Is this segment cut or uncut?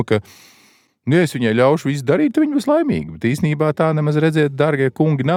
uncut